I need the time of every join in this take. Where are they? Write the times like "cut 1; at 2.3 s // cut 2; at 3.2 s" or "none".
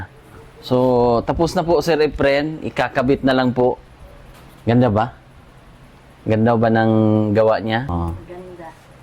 cut 1; at 3.9 s // cut 2; at 7.9 s